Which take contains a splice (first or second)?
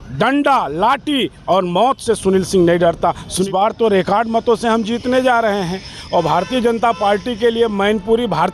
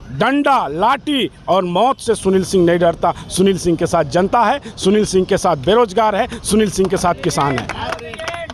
first